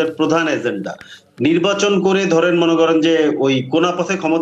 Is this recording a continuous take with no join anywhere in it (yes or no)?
yes